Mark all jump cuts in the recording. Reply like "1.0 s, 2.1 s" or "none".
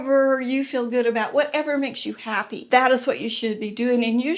2.5 s